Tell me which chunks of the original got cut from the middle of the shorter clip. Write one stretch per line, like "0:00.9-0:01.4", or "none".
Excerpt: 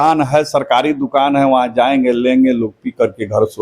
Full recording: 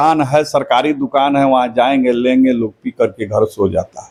none